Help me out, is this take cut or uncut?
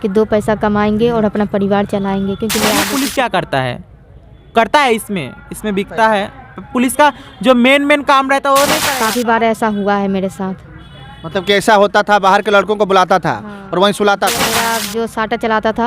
cut